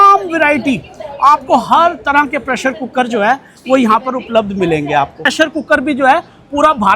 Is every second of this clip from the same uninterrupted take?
no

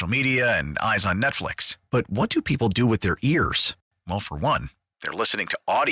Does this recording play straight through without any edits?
yes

